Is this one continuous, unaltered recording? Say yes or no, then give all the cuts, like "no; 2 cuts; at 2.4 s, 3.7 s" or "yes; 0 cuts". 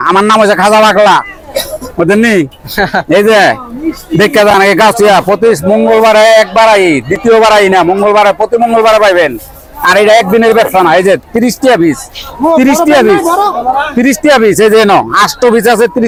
yes; 0 cuts